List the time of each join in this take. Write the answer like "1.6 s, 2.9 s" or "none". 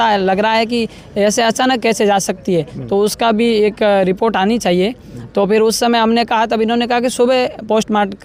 none